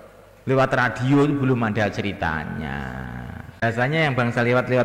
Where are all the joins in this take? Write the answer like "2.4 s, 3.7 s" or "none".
3.6 s